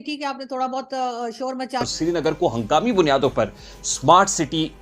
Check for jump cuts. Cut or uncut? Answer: cut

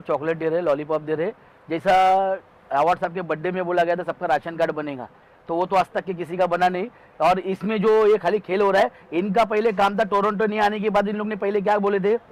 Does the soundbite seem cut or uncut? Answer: uncut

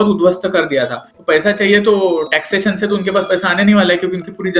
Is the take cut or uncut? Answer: cut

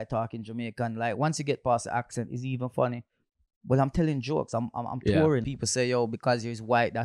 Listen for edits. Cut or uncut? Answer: cut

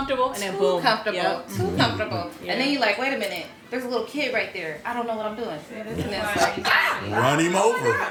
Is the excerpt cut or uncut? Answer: uncut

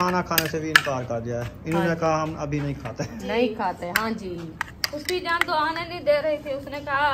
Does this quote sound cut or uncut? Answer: uncut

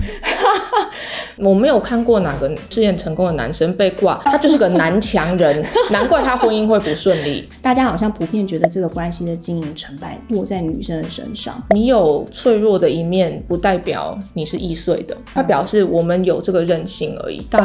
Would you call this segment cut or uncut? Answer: cut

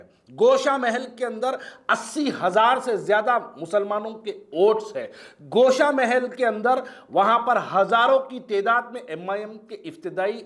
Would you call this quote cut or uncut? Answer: uncut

